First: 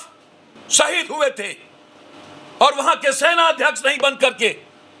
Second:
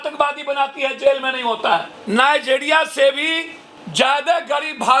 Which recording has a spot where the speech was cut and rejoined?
second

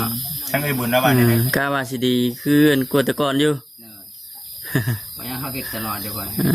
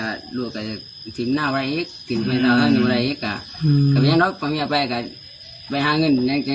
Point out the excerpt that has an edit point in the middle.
first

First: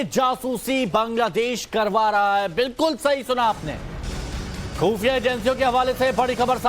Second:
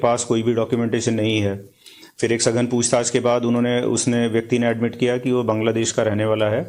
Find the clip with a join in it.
first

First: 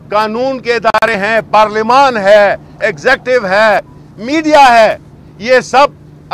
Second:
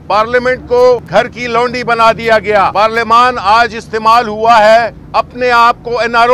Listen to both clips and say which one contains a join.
second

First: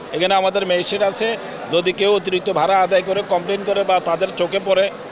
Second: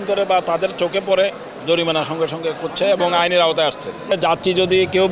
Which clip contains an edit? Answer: second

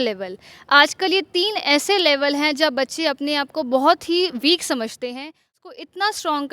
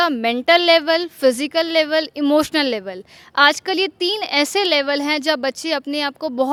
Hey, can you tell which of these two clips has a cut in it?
first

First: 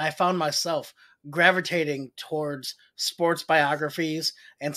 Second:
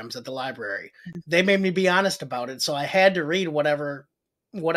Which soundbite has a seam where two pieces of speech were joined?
second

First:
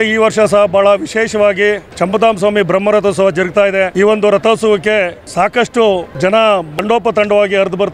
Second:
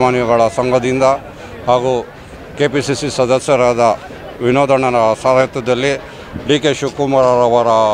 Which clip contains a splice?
first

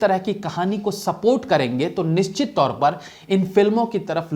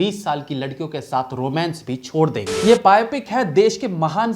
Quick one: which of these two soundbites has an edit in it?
second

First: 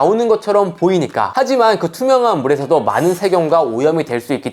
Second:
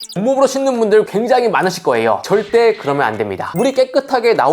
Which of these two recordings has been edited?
second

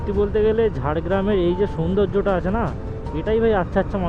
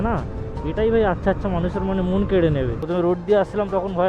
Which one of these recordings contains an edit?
second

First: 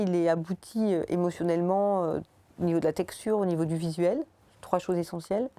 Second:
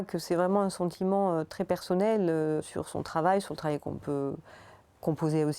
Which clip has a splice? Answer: second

